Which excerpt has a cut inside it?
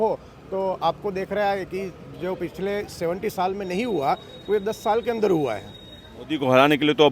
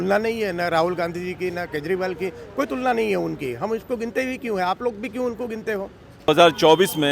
second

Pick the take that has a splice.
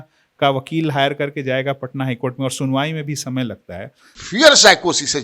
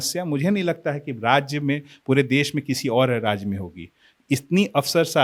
first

